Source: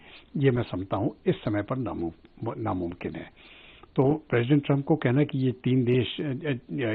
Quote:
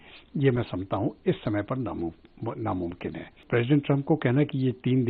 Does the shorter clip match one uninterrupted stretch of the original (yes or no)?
no